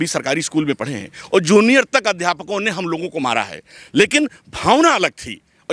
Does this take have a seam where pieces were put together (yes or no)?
no